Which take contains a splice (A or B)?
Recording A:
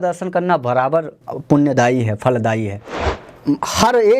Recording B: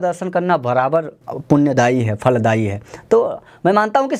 A